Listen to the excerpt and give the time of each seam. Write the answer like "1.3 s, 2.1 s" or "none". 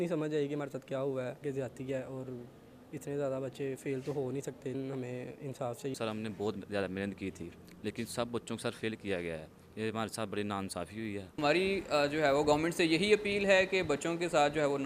1.4 s, 4.7 s, 5.9 s, 11.4 s

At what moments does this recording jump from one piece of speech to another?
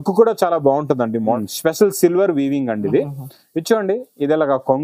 1.4 s

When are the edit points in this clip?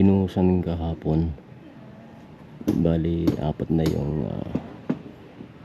none

